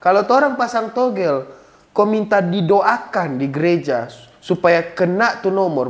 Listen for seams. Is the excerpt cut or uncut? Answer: uncut